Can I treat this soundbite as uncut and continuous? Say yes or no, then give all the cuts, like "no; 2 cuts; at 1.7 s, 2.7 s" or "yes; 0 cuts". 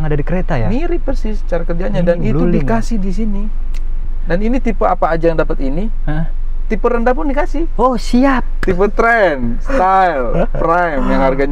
yes; 0 cuts